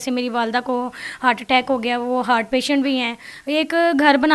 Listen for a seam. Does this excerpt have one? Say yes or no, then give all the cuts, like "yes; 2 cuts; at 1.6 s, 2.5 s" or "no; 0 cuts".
yes; 1 cut; at 3.3 s